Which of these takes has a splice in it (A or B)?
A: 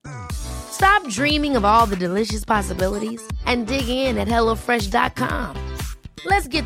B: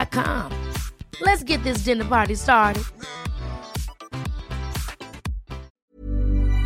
B